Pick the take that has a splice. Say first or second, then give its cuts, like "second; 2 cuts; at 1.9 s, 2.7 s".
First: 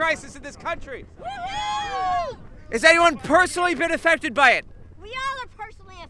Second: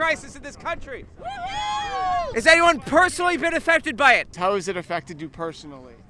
second; 2 cuts; at 2.3 s, 4.3 s